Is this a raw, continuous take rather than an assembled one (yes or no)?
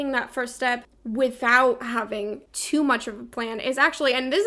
no